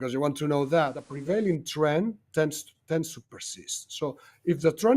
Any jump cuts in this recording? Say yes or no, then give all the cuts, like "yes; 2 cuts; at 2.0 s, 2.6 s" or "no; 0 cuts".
yes; 1 cut; at 1.1 s